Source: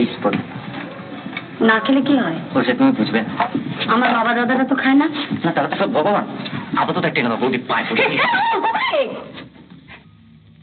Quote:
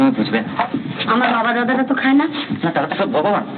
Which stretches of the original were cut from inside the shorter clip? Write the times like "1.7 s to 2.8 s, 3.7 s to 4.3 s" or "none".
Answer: none

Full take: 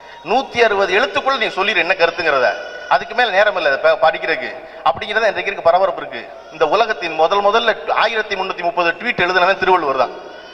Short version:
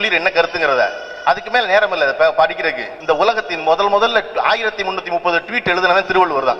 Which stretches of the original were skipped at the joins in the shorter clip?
4.5 s to 6.4 s

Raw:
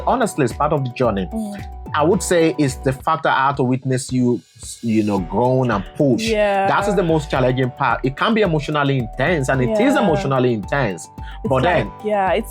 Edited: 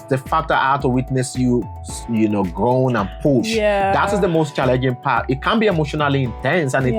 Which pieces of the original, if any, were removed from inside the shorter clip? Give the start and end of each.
none

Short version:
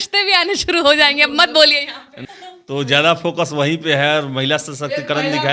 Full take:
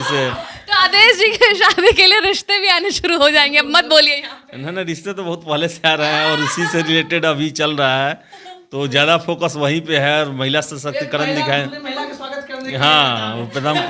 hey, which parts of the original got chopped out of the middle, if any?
4.6 s to 8.3 s

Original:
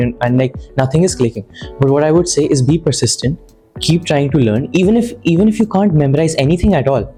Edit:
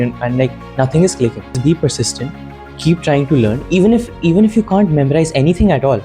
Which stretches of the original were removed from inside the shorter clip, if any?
1.6 s to 2.6 s

